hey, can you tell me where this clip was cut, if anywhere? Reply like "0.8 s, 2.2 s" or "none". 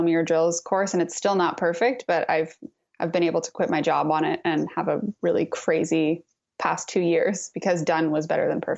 none